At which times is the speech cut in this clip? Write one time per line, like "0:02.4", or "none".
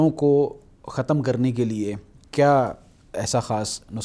none